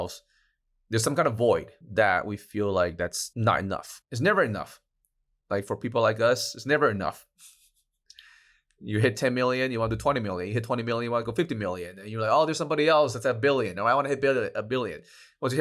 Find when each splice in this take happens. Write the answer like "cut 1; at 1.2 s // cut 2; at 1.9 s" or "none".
cut 1; at 3.9 s